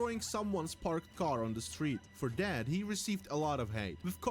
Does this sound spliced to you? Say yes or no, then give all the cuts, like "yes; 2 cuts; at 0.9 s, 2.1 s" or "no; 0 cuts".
yes; 1 cut; at 0.9 s